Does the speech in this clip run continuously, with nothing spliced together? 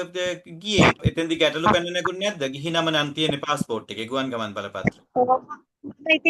no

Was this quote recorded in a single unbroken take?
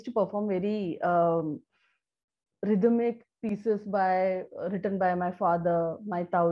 yes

